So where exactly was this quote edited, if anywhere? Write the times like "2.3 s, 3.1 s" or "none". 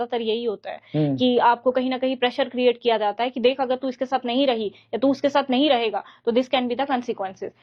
none